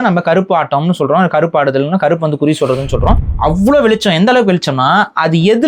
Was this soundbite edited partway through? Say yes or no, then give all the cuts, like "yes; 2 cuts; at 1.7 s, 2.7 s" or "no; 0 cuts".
yes; 1 cut; at 3.3 s